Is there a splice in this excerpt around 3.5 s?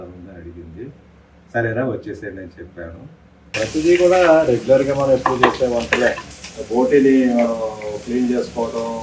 yes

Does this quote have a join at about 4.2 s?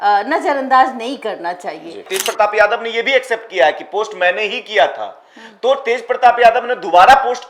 no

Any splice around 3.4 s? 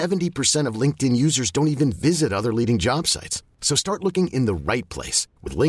no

